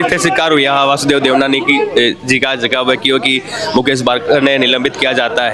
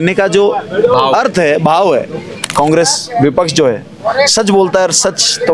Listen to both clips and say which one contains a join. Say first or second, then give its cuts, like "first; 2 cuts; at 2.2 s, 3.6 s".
second; 1 cut; at 2.4 s